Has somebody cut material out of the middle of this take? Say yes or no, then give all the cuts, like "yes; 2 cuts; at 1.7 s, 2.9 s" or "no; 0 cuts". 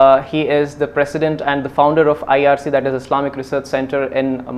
no; 0 cuts